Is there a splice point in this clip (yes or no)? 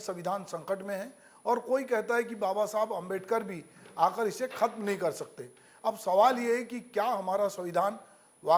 no